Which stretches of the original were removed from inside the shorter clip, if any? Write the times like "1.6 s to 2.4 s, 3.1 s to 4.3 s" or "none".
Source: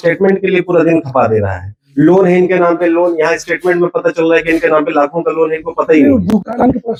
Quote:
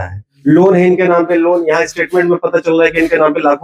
none